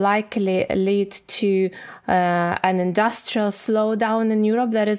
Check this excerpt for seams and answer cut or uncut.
uncut